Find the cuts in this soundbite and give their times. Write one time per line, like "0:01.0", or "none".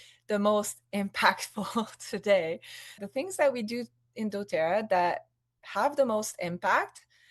0:03.0